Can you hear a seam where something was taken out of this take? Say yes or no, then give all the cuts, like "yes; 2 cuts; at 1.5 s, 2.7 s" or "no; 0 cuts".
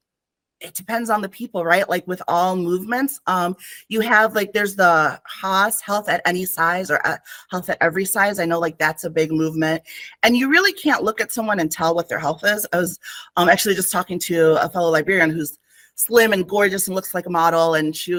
no; 0 cuts